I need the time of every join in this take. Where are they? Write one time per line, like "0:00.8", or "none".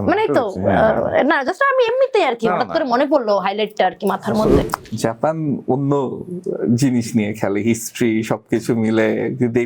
0:04.6

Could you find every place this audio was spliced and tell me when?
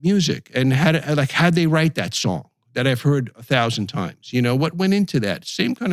none

